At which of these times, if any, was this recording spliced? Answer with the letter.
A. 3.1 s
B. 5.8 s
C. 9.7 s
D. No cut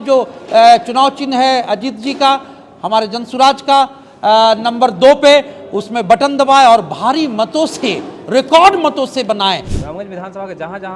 C